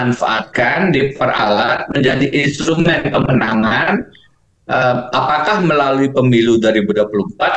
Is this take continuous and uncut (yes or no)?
yes